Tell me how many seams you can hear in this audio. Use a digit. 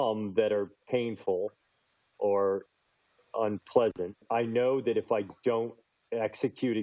0